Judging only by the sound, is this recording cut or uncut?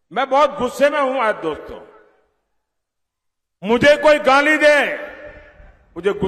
uncut